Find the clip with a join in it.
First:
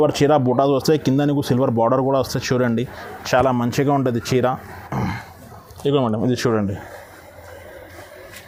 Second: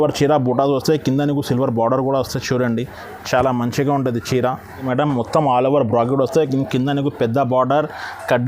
second; 1 cut; at 4.8 s

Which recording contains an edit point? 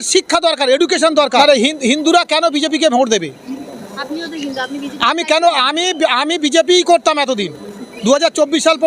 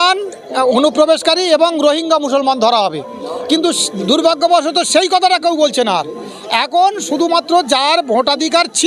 first; 1 cut; at 1.4 s

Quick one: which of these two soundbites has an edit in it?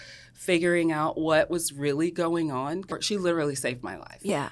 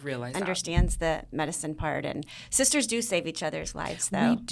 first; 1 cut; at 2.9 s

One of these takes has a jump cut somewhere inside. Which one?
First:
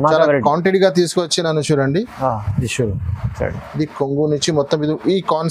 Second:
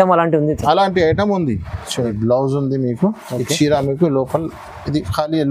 second; 1 cut; at 2.1 s

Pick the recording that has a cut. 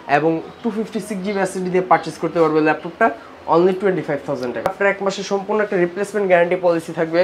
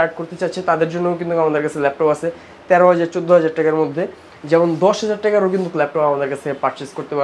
first; 1 cut; at 4.7 s

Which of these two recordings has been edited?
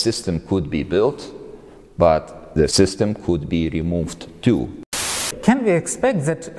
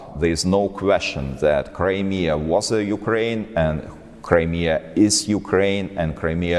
first; 2 cuts; at 2.7 s, 5.0 s

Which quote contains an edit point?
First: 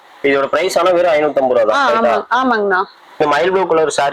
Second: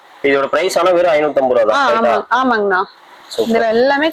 first; 1 cut; at 3.2 s

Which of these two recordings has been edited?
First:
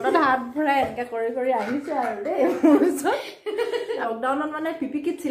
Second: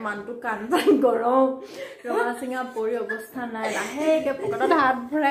first; 1 cut; at 4.0 s

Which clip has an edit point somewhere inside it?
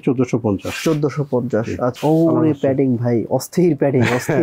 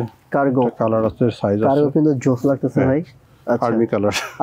first; 1 cut; at 2.0 s

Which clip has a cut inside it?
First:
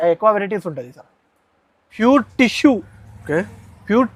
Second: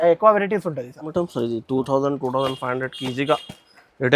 second; 1 cut; at 1.1 s

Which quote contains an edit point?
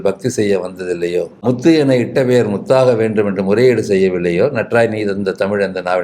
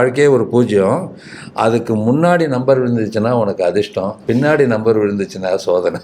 first; 1 cut; at 1.4 s

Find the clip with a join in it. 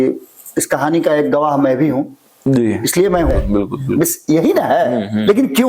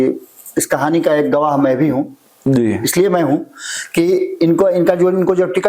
first; 1 cut; at 3.3 s

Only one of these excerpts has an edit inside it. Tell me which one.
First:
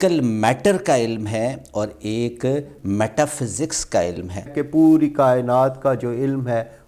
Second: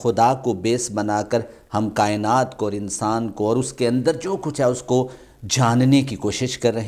first; 1 cut; at 4.6 s

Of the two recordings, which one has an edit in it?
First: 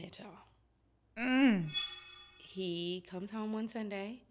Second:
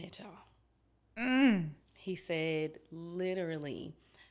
first; 1 cut; at 1.9 s

